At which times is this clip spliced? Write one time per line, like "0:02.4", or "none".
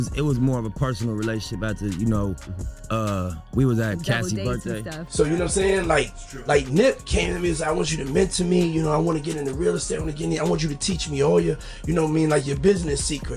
0:04.8